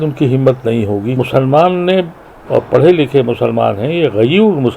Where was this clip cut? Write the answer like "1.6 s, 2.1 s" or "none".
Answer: 1.1 s